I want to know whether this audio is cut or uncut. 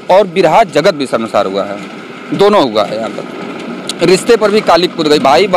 uncut